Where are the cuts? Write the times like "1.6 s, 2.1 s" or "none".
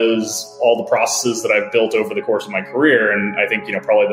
none

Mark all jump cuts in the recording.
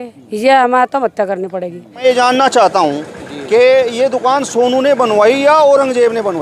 2.0 s

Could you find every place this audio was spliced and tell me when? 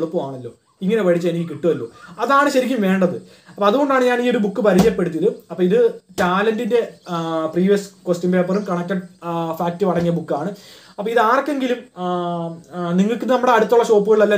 none

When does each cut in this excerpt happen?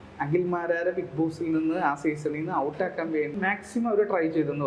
3.3 s

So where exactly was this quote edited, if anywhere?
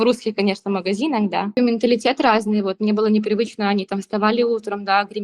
1.6 s

